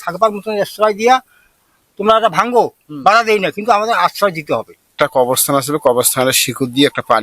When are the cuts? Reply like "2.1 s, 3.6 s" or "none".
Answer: 4.8 s